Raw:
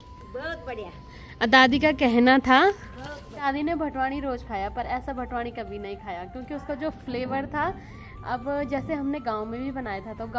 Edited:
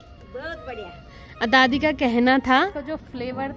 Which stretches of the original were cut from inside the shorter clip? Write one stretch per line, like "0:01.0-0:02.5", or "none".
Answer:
0:02.7-0:06.6